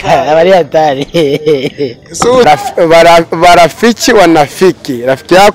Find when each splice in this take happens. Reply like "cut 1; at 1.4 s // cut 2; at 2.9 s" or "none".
cut 1; at 2.4 s